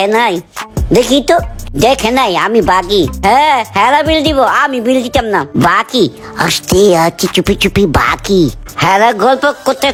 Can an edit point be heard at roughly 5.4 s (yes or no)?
no